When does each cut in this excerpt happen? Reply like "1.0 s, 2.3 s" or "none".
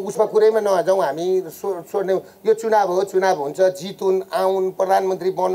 none